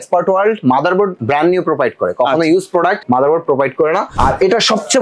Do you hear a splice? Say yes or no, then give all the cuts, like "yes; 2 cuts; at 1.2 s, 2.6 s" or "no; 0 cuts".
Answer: yes; 3 cuts; at 1.2 s, 3.0 s, 4.1 s